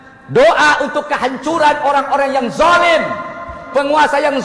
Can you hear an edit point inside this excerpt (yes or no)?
no